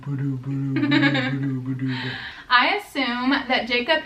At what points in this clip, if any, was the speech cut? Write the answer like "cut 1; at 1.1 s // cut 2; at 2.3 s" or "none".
cut 1; at 2.3 s

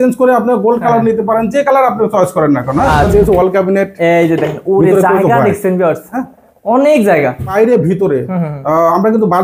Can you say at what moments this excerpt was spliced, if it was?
cut 1; at 3.1 s // cut 2; at 7.5 s

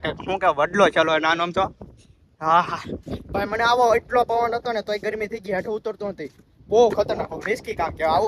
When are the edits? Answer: none

